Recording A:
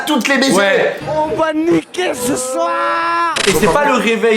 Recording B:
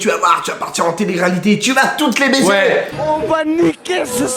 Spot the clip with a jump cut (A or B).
A